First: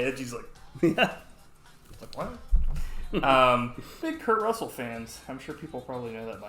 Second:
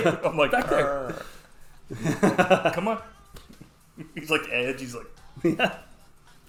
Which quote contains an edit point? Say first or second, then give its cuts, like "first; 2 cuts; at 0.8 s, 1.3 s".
first; 1 cut; at 4.0 s